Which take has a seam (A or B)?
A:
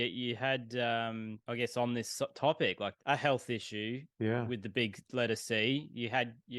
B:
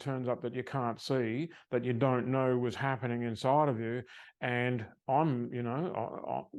A